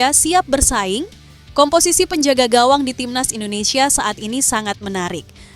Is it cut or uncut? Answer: uncut